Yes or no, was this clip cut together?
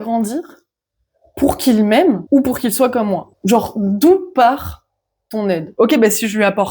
yes